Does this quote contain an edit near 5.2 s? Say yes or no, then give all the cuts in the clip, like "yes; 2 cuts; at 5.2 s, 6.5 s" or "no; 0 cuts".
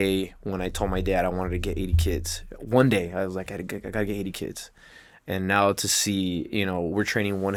no; 0 cuts